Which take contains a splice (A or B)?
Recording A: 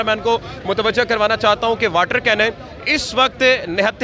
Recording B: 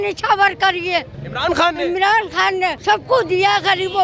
B